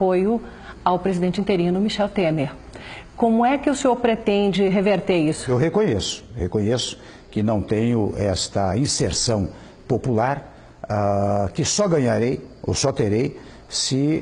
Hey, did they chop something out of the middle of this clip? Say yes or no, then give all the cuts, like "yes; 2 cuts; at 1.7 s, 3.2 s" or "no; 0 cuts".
yes; 1 cut; at 5.5 s